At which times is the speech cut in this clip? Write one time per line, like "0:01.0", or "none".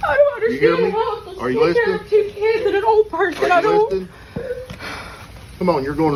none